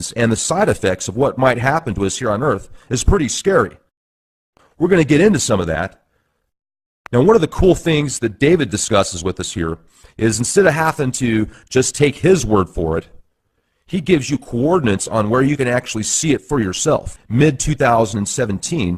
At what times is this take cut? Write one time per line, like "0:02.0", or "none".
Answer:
none